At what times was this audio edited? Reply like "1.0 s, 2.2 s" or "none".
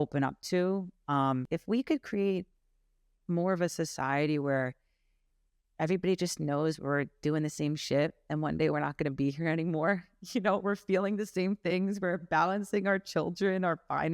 1.5 s